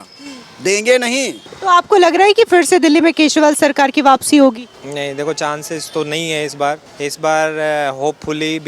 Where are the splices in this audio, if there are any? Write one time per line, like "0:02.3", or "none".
0:01.4
0:04.7
0:06.9